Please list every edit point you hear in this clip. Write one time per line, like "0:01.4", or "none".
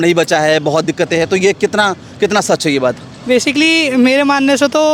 none